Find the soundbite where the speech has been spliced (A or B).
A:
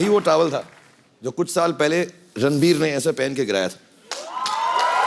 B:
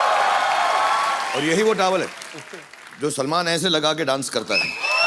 B